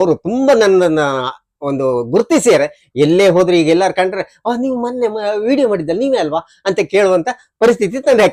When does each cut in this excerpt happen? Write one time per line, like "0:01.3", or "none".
none